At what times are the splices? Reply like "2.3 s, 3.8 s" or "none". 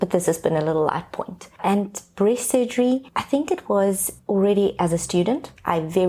3.1 s, 4.1 s

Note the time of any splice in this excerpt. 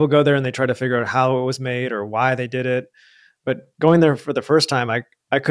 none

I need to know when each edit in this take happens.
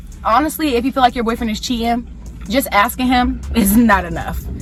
none

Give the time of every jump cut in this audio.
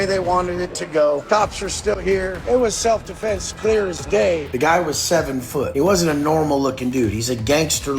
1.2 s, 2.4 s, 4.4 s, 5.7 s

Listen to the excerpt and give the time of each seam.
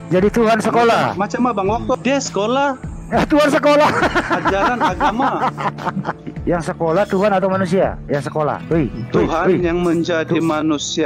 none

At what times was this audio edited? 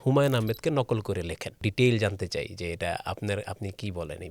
1.5 s

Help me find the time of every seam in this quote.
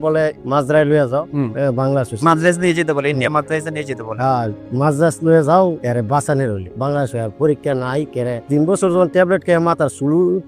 none

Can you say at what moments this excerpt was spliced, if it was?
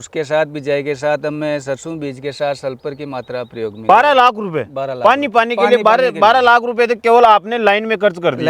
3.8 s

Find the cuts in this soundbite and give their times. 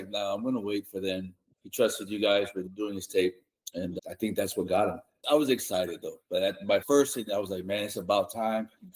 1.4 s, 2.7 s, 3.9 s, 5.2 s, 6.8 s

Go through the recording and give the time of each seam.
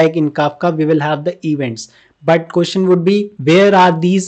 none

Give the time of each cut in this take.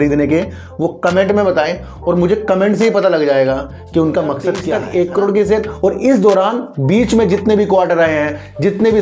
4.6 s

